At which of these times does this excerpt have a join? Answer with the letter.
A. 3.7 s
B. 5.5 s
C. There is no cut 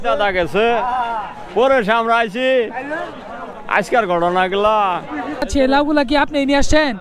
B